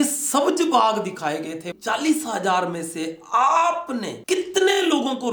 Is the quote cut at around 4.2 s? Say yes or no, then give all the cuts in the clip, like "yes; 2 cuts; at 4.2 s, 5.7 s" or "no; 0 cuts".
no; 1 cut; at 1.7 s